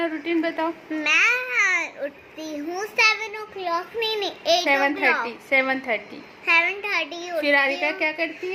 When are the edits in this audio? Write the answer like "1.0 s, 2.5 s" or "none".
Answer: none